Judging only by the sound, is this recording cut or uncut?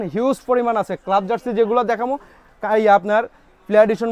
uncut